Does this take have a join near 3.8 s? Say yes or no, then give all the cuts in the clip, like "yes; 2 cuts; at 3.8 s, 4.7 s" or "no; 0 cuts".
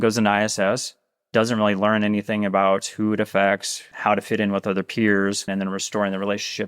yes; 2 cuts; at 3.8 s, 5.5 s